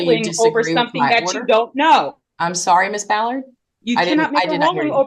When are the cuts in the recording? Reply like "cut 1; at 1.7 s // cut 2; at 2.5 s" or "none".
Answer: none